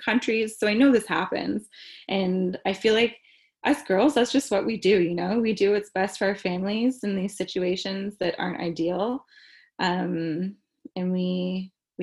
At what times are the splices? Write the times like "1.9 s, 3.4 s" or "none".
none